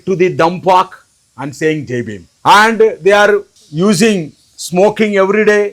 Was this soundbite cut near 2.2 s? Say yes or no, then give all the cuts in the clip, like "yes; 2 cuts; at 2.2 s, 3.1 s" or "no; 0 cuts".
yes; 2 cuts; at 2.2 s, 3.6 s